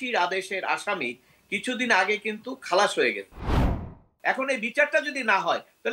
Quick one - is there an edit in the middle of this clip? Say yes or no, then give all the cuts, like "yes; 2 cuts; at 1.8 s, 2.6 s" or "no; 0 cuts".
yes; 1 cut; at 3.5 s